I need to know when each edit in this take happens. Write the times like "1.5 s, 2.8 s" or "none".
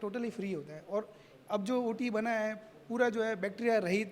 none